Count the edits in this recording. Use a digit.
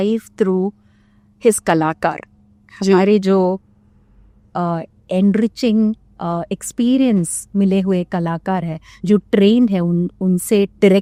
0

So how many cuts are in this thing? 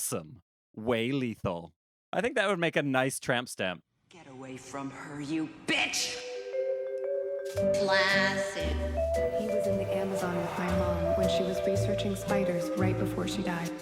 2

